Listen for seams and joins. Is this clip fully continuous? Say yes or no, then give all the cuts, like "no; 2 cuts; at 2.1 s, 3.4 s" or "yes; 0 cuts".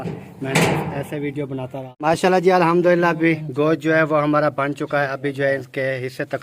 no; 1 cut; at 1.9 s